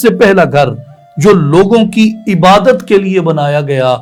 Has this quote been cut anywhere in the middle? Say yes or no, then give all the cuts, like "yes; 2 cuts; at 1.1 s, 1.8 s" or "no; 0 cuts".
no; 0 cuts